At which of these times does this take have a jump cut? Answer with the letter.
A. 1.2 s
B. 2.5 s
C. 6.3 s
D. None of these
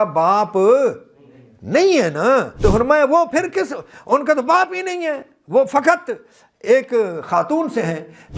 B